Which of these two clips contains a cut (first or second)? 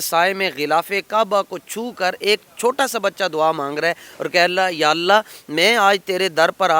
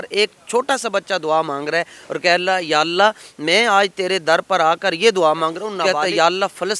second